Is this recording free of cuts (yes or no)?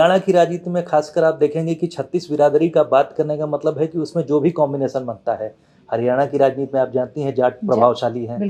yes